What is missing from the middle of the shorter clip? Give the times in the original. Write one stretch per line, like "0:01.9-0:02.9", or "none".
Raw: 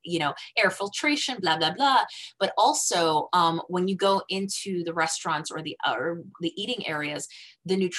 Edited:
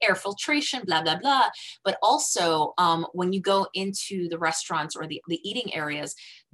0:05.7-0:06.3